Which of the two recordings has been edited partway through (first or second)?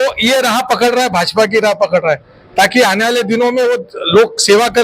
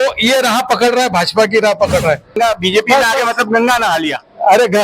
second